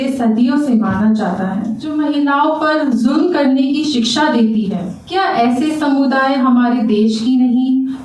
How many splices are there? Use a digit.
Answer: 2